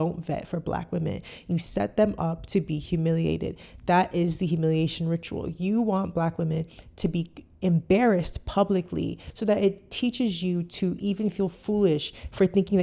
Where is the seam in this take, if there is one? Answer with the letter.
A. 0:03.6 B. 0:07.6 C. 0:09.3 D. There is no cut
C